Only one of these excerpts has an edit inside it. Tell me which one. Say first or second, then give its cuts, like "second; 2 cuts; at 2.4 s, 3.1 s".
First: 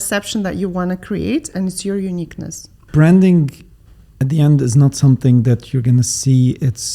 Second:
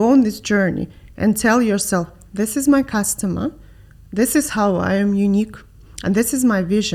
first; 1 cut; at 2.8 s